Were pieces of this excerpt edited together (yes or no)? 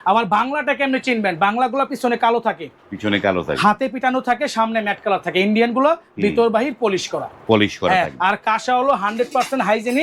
no